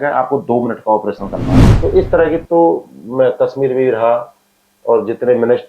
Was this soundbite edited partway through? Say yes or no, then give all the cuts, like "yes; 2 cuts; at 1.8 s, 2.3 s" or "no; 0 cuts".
yes; 1 cut; at 1.6 s